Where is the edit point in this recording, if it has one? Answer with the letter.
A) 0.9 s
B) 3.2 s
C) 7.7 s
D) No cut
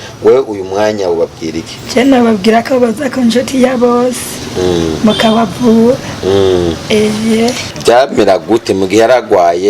C